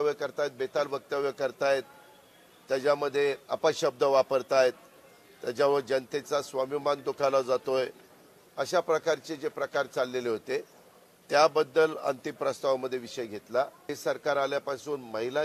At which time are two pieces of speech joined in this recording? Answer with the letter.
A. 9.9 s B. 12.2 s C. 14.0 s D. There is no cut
C